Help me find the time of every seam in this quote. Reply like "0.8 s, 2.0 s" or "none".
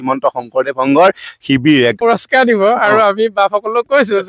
2.0 s

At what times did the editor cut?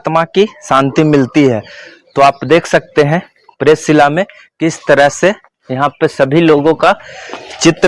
none

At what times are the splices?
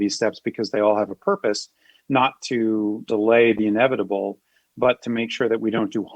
none

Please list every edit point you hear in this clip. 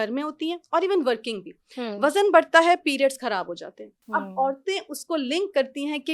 none

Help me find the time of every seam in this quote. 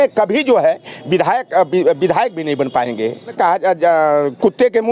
3.3 s

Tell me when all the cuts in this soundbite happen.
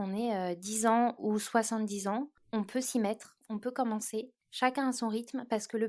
4.4 s

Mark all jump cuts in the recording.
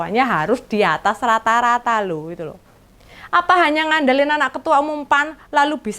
none

